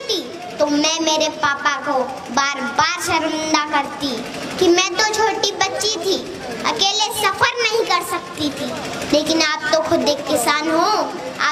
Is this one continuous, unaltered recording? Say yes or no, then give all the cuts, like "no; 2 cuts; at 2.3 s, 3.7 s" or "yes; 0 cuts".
yes; 0 cuts